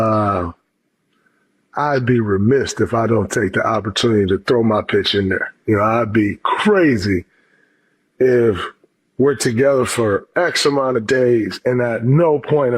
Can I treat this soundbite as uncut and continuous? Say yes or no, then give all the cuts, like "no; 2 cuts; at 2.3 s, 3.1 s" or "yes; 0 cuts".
yes; 0 cuts